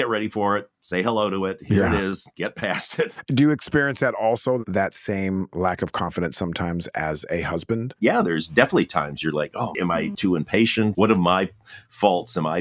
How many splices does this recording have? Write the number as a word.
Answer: three